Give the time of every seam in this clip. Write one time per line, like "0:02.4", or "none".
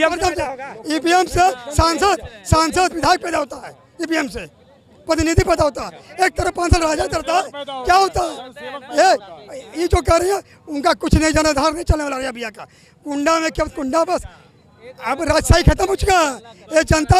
none